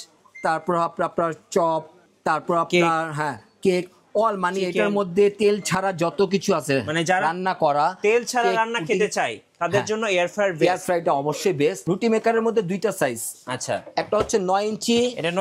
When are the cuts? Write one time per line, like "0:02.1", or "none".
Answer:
0:11.8